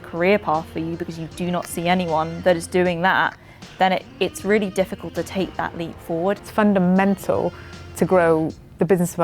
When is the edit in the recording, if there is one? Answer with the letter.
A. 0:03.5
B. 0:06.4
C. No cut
B